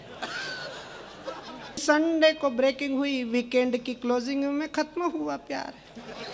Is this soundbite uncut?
no; 1 cut; at 1.8 s

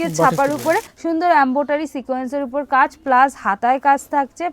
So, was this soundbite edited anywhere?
yes; 1 cut; at 0.9 s

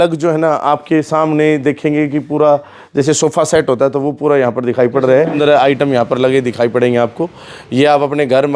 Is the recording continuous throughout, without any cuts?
no; 1 cut; at 5.4 s

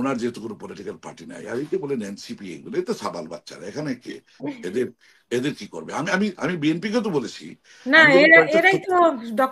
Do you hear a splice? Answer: no; 0 cuts

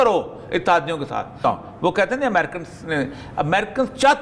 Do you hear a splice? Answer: yes; 1 cut; at 1.4 s

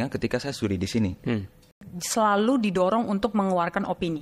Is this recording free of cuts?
no; 1 cut; at 2.0 s

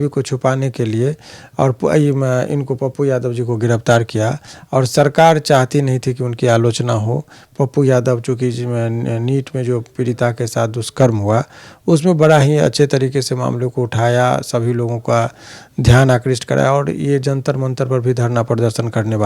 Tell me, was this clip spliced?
no; 0 cuts

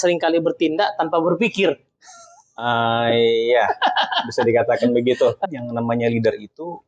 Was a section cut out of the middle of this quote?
yes; 1 cut; at 5.4 s

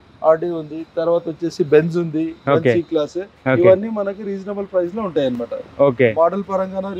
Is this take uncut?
yes; 0 cuts

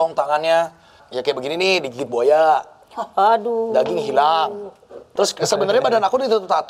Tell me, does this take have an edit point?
yes; 2 cuts; at 1.0 s, 5.1 s

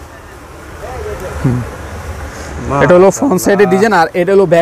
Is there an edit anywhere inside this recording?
no; 0 cuts

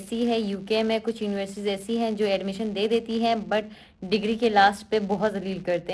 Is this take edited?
no; 0 cuts

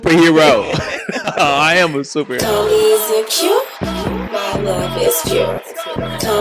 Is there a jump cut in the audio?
yes; 1 cut; at 2.4 s

